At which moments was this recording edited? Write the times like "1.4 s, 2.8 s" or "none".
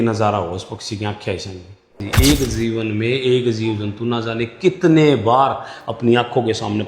2.1 s